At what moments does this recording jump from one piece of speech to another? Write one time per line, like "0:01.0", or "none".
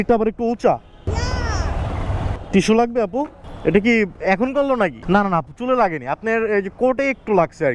0:01.1
0:02.4
0:05.0